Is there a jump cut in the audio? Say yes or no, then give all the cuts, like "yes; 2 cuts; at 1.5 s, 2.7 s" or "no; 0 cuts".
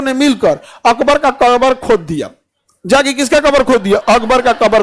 no; 0 cuts